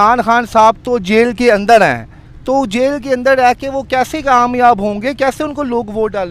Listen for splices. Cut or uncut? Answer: uncut